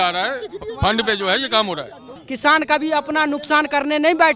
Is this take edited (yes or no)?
yes